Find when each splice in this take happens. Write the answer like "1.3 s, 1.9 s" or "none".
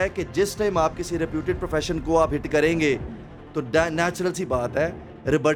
none